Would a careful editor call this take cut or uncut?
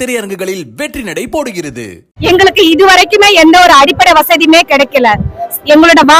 cut